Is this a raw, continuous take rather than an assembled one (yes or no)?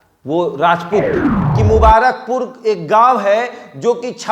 no